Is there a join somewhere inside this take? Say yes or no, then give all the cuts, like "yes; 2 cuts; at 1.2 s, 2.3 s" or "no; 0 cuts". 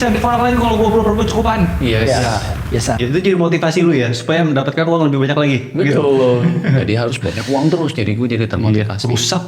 yes; 1 cut; at 3.0 s